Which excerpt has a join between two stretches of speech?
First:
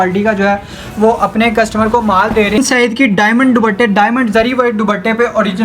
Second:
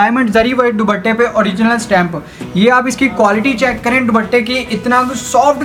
first; 1 cut; at 2.6 s

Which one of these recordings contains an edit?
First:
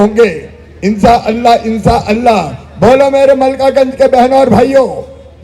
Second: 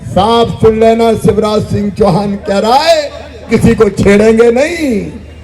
second; 1 cut; at 3.5 s

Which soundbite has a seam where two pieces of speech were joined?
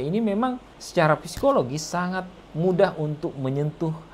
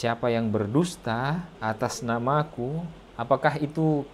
second; 2 cuts; at 1.5 s, 3.1 s

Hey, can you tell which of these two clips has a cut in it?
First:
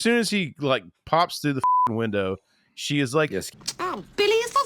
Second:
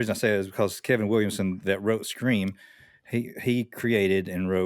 first; 1 cut; at 3.5 s

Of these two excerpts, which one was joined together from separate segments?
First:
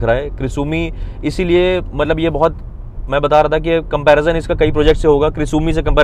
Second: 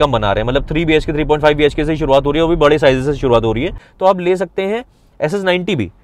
second; 1 cut; at 3.8 s

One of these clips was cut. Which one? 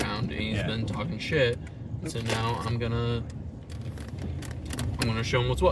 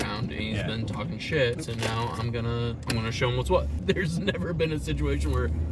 second; 3 cuts; at 1.6 s, 2.8 s, 3.7 s

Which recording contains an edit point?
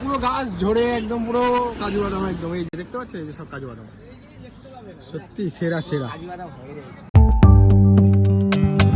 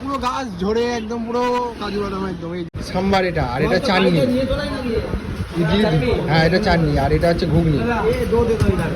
second; 1 cut; at 2.8 s

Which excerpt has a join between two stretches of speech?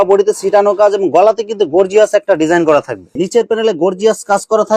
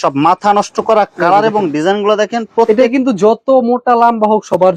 first; 1 cut; at 3.2 s

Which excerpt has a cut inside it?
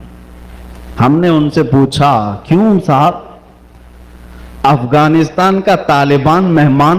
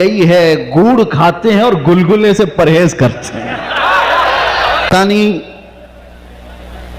second; 1 cut; at 4.9 s

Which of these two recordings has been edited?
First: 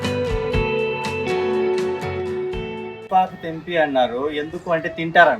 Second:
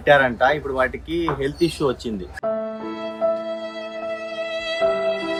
first; 1 cut; at 3.0 s

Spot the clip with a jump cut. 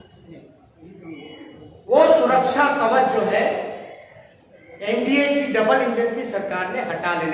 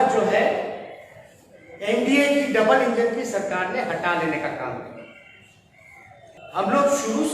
second; 1 cut; at 6.4 s

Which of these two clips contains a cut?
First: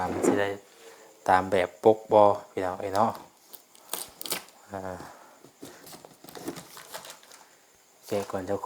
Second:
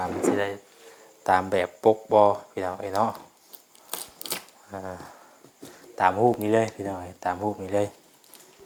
first; 1 cut; at 5.8 s

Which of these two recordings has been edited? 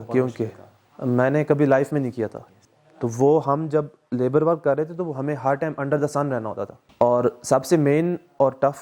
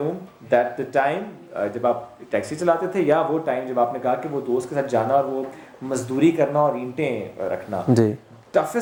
first; 2 cuts; at 2.5 s, 6.8 s

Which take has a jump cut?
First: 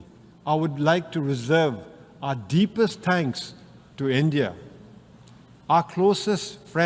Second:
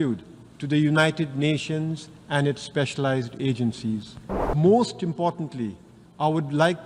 second; 1 cut; at 4.5 s

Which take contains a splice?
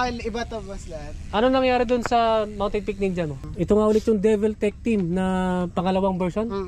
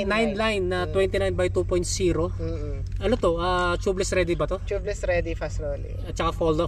first; 1 cut; at 3.4 s

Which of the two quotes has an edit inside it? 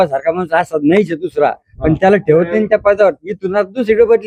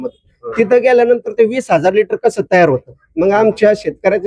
second; 1 cut; at 3.0 s

